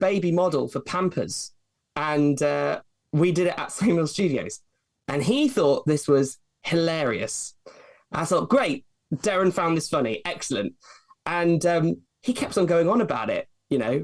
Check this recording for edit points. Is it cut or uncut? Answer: uncut